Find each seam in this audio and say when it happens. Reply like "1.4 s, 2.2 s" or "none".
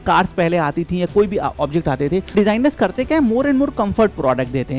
2.3 s

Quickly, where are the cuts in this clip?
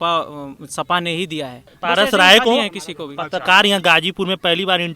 1.7 s

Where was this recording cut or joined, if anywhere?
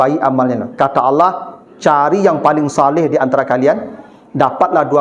none

